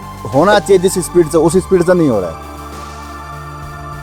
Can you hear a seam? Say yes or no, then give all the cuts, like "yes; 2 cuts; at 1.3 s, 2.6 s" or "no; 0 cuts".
no; 0 cuts